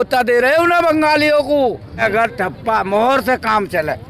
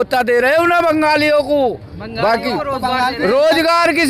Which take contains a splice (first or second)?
first